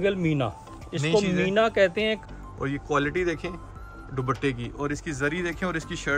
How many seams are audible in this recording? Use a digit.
1